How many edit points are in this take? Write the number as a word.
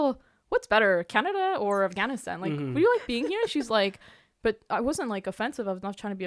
zero